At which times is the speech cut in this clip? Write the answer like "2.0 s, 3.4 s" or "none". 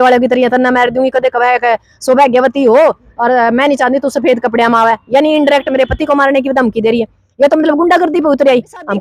none

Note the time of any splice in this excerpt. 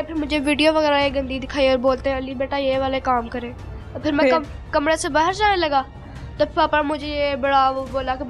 none

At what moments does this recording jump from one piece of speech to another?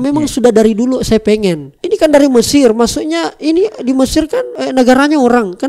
1.7 s, 4.6 s

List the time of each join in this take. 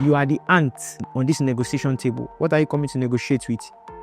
1.1 s

